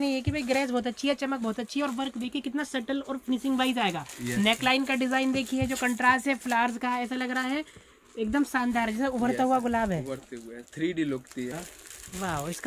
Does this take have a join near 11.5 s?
yes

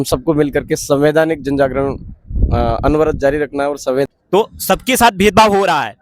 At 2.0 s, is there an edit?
no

